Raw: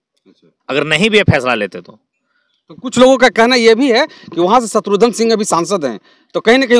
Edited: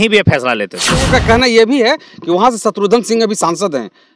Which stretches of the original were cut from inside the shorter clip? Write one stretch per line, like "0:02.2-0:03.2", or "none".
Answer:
0:02.1-0:03.2